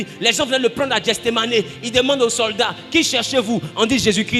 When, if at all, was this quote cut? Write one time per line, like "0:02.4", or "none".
none

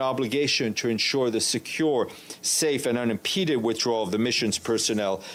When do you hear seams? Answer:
none

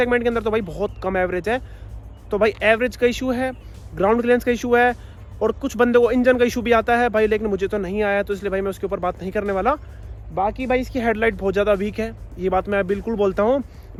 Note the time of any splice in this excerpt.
none

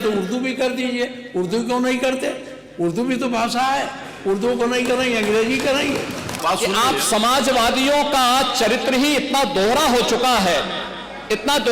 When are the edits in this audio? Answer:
0:06.3

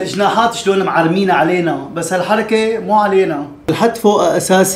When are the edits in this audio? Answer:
0:03.7

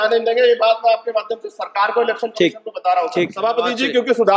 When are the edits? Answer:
0:03.3

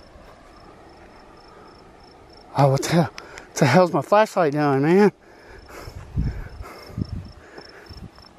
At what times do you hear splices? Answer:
none

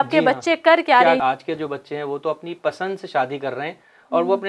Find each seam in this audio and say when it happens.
0:01.2

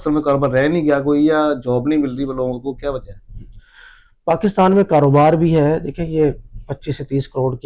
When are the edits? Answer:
none

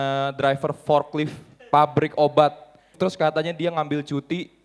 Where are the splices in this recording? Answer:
0:02.9

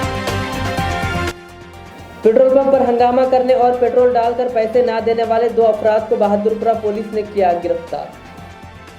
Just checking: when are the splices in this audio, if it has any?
0:00.9
0:01.3

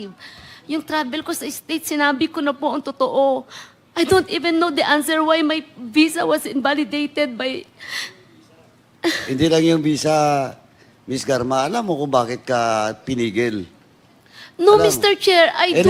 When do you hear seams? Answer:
none

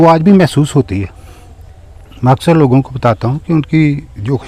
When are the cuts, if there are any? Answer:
none

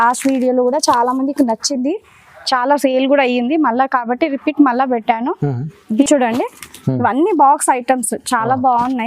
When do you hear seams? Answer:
0:05.9

